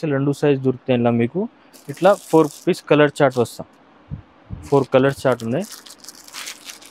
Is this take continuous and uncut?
yes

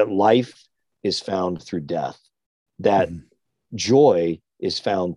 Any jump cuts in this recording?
no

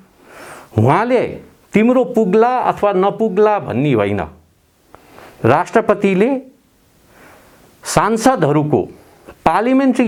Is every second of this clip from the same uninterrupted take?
yes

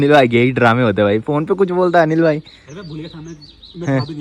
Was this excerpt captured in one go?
yes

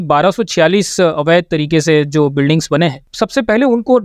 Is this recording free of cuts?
no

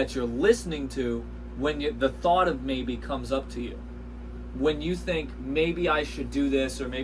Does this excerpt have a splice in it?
no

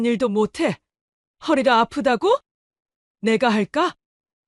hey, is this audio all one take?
yes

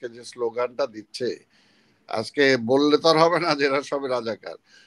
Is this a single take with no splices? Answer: yes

